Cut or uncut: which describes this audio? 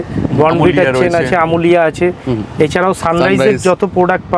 uncut